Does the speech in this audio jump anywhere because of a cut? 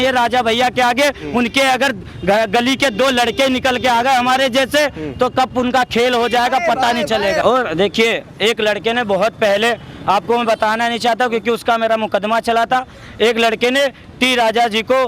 no; 0 cuts

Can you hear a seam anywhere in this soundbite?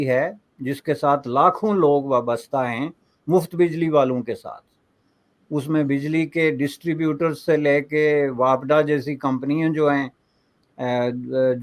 no; 0 cuts

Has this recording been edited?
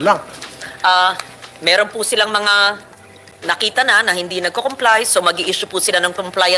no; 0 cuts

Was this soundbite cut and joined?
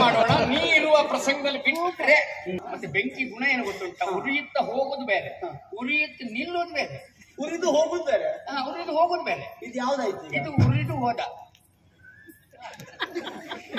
yes; 1 cut; at 2.6 s

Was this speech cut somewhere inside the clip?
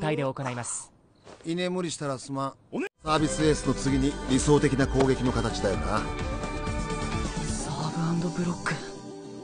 yes; 1 cut; at 3.0 s

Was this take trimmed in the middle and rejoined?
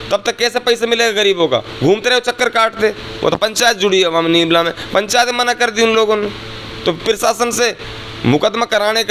no; 0 cuts

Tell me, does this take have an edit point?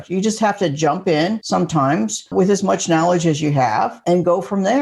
yes; 3 cuts; at 1.4 s, 2.3 s, 4.0 s

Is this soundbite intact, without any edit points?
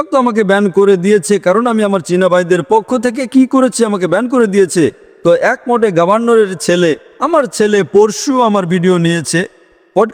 yes; 0 cuts

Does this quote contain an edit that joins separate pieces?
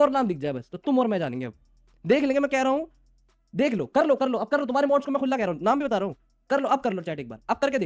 no; 0 cuts

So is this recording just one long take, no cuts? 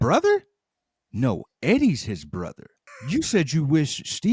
yes; 0 cuts

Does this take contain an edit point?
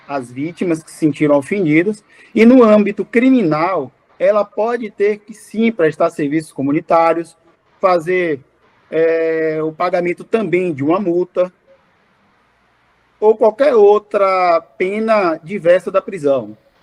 no; 0 cuts

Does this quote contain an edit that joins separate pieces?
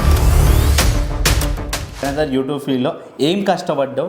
yes; 1 cut; at 2.0 s

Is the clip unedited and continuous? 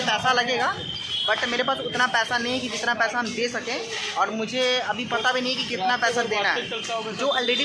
yes; 0 cuts

